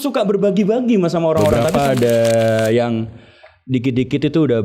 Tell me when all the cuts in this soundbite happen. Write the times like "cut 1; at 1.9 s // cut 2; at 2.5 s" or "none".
cut 1; at 1.6 s